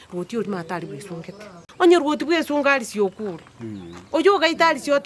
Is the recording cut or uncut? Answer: cut